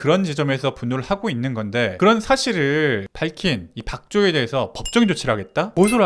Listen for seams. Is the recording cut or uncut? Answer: uncut